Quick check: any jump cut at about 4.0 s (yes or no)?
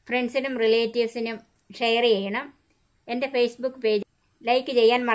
yes